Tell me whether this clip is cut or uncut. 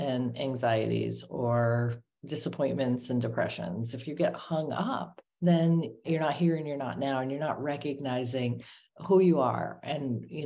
cut